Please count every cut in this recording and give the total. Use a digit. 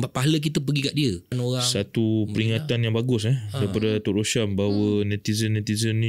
1